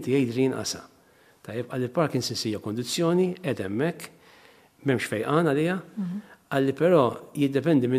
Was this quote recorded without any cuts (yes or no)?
yes